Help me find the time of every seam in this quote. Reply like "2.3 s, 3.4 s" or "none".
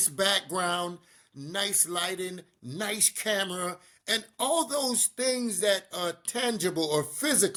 none